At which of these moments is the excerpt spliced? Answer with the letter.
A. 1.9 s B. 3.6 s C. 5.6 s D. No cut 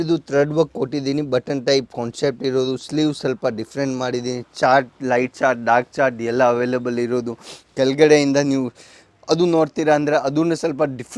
D